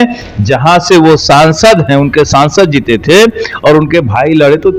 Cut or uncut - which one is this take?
uncut